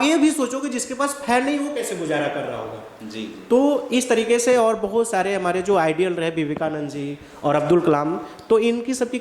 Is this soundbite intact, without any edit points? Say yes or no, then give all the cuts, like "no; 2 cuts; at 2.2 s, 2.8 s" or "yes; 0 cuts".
yes; 0 cuts